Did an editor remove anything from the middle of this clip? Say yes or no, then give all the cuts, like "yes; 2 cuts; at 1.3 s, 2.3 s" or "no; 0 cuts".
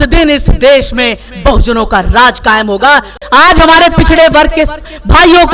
yes; 1 cut; at 3.2 s